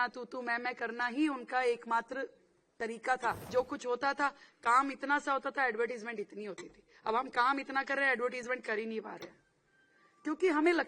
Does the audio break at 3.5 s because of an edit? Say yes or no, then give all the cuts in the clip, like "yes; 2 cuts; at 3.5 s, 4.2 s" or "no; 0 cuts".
yes; 1 cut; at 3.5 s